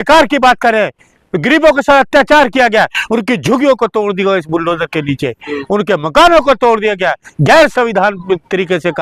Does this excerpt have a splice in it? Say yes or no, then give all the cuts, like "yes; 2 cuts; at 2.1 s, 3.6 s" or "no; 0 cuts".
no; 0 cuts